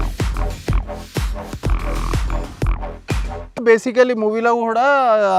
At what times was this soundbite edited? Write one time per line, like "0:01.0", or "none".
0:03.6